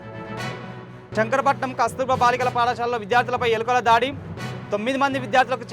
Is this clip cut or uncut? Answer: cut